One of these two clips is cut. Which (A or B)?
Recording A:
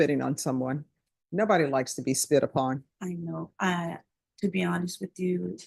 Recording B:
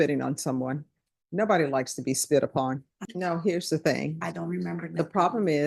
B